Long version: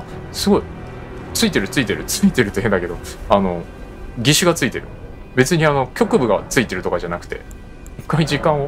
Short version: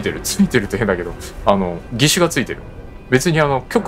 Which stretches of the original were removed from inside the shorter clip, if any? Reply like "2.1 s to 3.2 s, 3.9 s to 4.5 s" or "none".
3.7 s to 4.1 s